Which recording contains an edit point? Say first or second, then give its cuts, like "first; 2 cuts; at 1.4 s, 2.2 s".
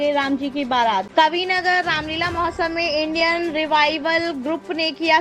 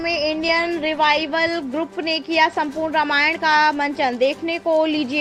first; 1 cut; at 1.1 s